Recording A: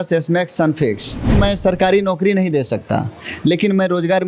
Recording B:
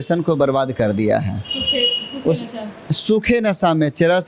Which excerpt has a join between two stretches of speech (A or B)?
A